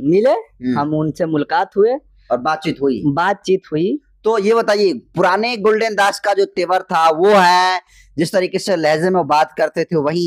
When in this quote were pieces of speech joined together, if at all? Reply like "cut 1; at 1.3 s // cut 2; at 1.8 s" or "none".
none